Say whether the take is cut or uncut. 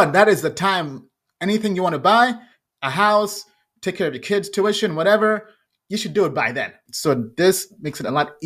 cut